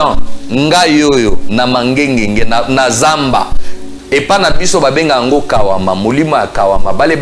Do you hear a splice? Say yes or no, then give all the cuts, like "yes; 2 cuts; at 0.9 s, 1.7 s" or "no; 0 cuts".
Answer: no; 0 cuts